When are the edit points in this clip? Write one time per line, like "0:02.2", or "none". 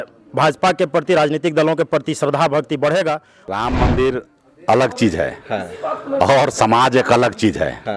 0:03.4